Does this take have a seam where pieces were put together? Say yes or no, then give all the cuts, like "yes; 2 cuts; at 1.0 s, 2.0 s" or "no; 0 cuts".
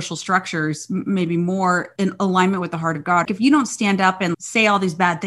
yes; 3 cuts; at 1.9 s, 3.2 s, 4.4 s